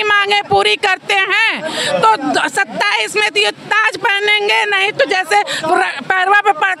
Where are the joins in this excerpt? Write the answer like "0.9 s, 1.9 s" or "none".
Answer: none